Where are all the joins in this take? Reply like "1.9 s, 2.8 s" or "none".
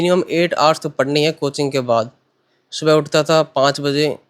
none